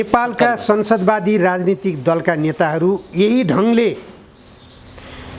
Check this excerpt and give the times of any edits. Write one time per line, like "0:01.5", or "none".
none